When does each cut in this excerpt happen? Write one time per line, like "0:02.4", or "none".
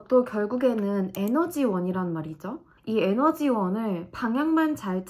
none